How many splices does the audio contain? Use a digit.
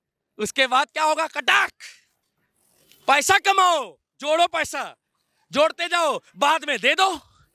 0